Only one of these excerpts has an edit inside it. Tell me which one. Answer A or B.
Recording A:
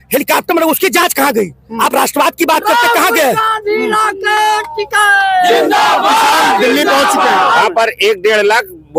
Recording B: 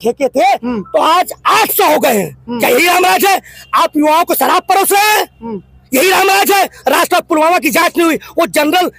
A